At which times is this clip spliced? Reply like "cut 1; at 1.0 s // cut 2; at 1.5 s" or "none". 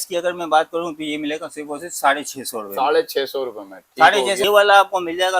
cut 1; at 4.4 s